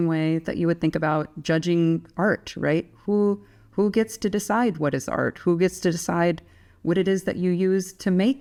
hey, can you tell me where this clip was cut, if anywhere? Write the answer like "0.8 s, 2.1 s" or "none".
none